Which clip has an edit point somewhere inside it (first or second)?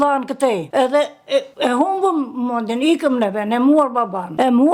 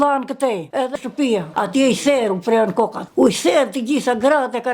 second